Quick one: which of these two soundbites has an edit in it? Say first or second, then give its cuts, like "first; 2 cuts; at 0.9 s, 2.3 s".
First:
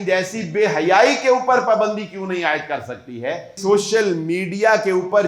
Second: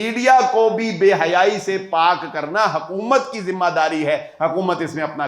first; 1 cut; at 3.5 s